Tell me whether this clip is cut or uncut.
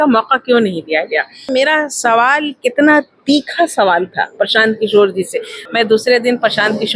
cut